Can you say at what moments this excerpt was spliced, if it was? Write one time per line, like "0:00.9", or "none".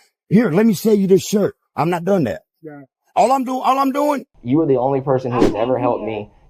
0:04.3